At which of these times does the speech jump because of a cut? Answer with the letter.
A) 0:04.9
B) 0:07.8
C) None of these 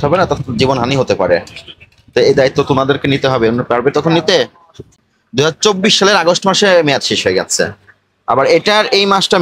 A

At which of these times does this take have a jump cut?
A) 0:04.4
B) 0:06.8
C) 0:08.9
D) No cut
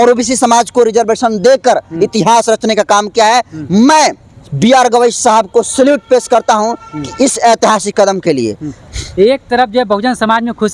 D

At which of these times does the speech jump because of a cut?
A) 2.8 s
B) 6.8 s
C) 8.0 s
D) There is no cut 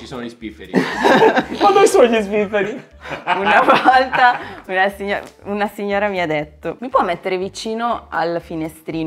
B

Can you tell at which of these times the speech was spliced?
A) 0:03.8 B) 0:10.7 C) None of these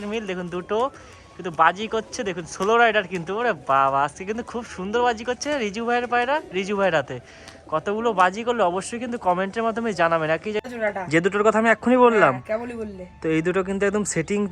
B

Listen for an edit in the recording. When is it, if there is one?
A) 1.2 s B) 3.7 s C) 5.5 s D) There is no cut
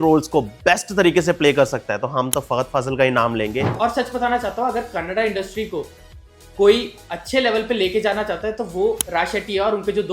B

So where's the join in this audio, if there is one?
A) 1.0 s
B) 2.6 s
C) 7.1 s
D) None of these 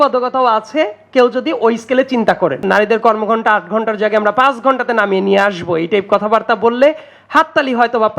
B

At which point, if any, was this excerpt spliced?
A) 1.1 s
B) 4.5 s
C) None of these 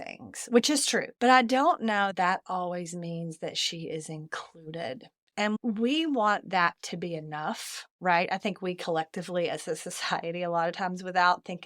A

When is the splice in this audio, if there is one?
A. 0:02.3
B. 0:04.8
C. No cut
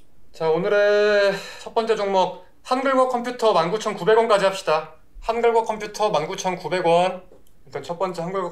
C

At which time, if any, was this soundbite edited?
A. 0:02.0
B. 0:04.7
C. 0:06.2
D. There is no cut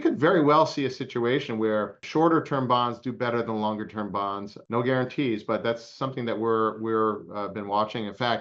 A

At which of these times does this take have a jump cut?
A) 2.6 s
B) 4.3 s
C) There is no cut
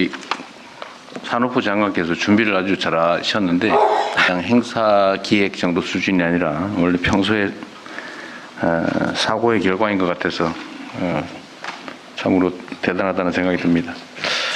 B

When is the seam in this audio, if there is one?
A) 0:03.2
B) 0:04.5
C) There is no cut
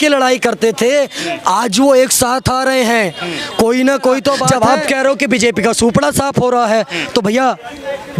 B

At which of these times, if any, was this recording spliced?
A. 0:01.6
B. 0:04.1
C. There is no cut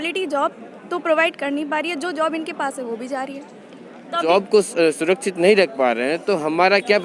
B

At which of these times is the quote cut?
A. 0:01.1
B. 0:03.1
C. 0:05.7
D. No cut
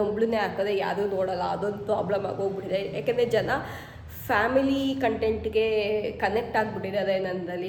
D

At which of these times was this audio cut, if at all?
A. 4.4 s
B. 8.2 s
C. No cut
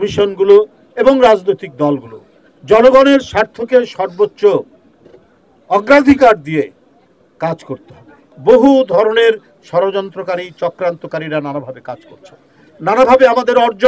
B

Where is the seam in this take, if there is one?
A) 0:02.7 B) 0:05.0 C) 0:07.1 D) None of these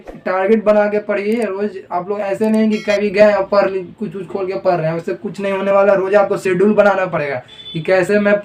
D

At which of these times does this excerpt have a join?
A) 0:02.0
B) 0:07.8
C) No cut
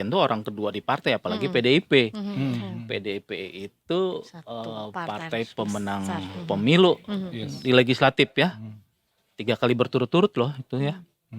C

